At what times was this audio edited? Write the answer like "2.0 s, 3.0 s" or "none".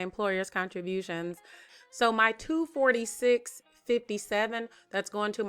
1.7 s